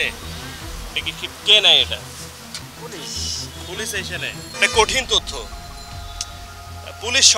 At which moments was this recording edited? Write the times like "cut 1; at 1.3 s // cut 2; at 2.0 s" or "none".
cut 1; at 2.6 s